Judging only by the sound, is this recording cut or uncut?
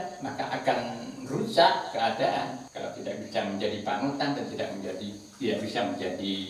cut